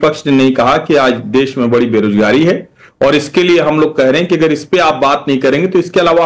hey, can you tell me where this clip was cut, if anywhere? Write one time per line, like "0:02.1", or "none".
none